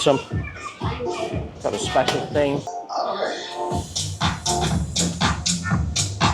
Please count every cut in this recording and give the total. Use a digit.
1